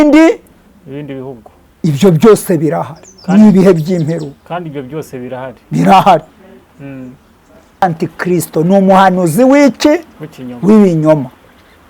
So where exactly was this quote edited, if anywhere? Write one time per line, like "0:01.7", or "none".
0:07.8